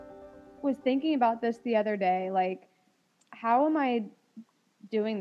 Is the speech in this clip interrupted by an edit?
no; 0 cuts

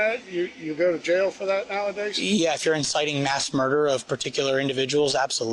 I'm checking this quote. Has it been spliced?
no; 0 cuts

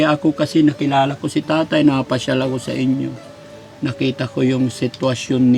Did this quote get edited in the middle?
no; 0 cuts

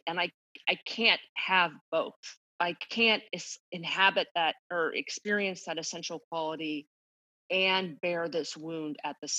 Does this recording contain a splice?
yes; 1 cut; at 2.5 s

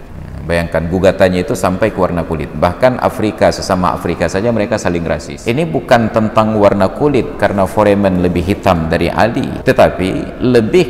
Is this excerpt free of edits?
no; 2 cuts; at 5.3 s, 9.5 s

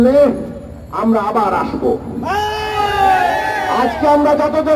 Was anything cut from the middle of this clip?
no; 0 cuts

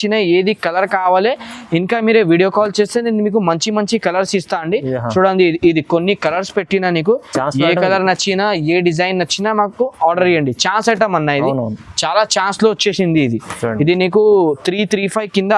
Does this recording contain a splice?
no; 0 cuts

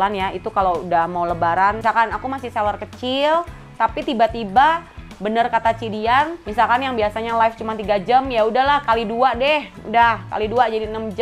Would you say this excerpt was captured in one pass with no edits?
no; 2 cuts; at 1.8 s, 6.4 s

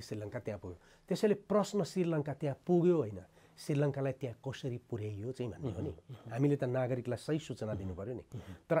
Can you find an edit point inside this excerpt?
no; 0 cuts

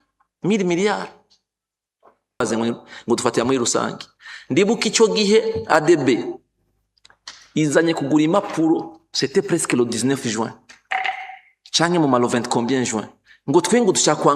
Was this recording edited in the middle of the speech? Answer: yes; 1 cut; at 2.4 s

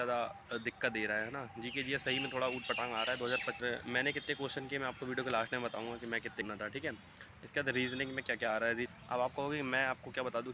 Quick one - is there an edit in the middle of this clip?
yes; 3 cuts; at 3.6 s, 6.4 s, 8.9 s

